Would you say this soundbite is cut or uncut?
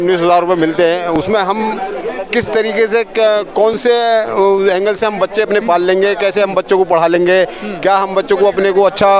uncut